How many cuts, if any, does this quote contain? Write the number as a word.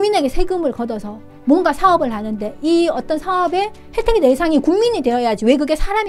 zero